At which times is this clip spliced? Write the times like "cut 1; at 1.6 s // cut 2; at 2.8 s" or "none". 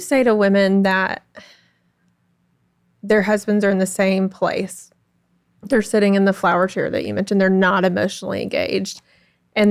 none